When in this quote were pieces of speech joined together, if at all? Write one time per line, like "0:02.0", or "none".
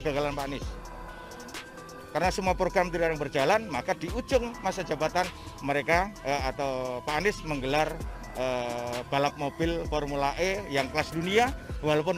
none